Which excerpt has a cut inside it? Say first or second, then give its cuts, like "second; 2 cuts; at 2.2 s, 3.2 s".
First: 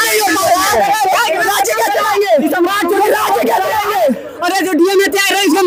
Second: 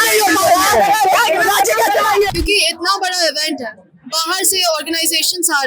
second; 1 cut; at 2.3 s